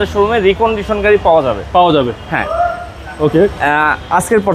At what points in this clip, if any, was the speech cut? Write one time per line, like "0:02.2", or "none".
none